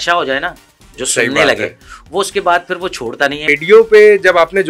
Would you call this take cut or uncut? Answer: cut